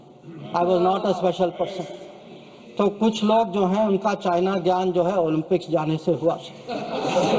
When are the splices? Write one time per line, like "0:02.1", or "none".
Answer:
none

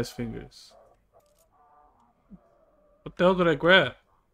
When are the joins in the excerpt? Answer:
0:01.2

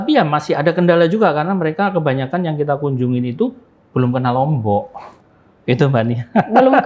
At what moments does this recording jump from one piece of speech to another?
none

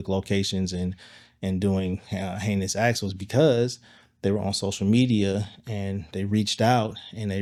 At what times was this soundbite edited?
none

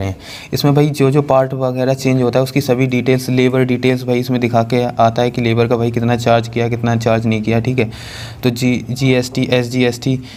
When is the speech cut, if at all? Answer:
none

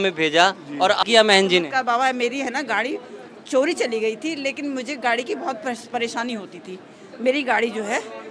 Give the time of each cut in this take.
0:01.0

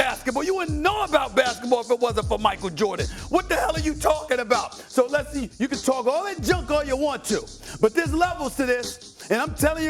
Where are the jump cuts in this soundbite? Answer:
none

